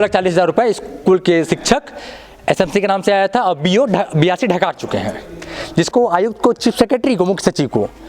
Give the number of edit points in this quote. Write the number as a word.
one